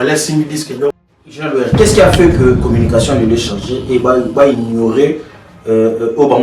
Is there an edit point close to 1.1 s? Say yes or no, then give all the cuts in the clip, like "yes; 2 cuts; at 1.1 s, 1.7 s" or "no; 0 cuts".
yes; 1 cut; at 1.1 s